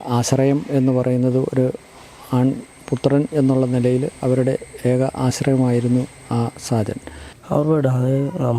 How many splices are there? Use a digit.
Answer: 1